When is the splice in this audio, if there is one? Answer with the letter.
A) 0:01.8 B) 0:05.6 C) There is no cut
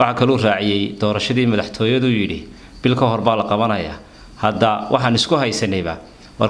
C